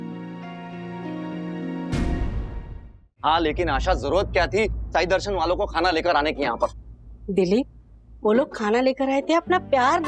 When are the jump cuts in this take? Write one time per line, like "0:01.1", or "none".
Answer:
0:03.1